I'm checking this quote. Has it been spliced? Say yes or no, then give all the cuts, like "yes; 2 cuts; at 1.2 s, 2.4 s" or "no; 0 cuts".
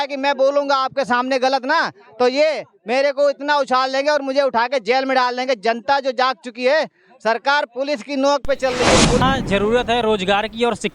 yes; 1 cut; at 9.2 s